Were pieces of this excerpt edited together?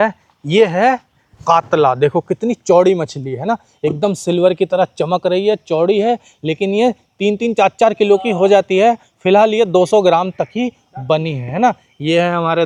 no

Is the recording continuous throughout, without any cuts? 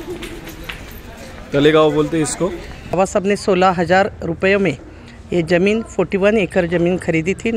no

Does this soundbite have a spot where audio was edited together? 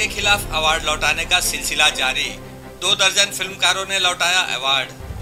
no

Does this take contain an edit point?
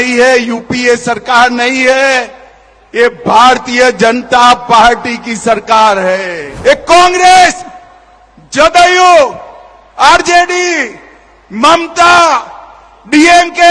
yes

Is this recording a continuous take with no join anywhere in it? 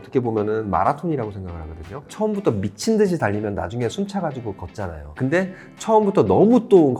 yes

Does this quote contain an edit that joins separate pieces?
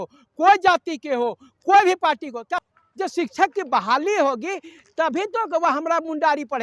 yes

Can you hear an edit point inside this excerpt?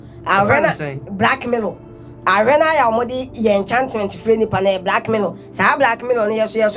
no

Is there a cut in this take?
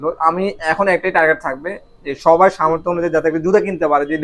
no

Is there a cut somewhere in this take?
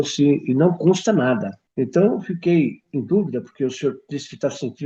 yes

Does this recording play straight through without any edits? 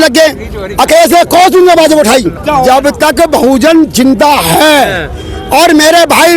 no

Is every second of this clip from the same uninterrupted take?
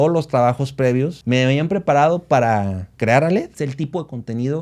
no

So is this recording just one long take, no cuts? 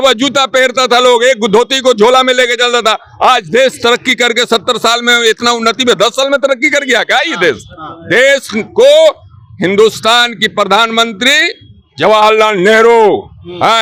yes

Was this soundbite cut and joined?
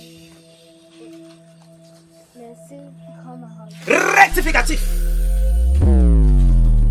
no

